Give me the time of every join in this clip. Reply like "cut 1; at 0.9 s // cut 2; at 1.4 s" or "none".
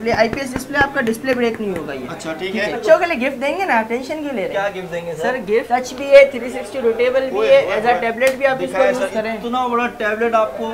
cut 1; at 2.8 s // cut 2; at 5.7 s